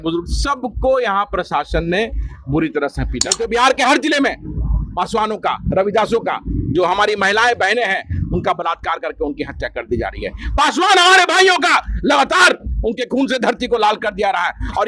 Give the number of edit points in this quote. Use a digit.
1